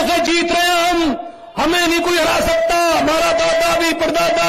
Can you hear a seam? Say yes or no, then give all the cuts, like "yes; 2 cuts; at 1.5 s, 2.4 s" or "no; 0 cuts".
no; 0 cuts